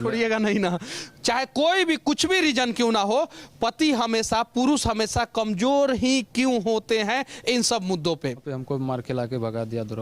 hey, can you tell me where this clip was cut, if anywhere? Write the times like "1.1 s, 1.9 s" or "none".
0.9 s, 8.5 s